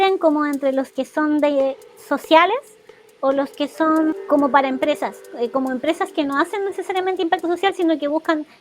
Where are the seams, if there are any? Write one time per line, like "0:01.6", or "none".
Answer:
0:04.1